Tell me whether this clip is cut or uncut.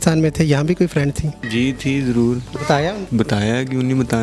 cut